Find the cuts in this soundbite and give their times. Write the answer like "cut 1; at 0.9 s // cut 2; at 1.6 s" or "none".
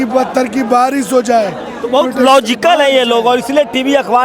none